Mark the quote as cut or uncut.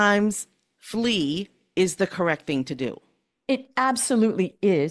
uncut